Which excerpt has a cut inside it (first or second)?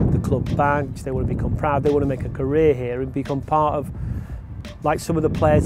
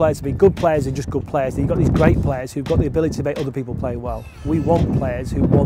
second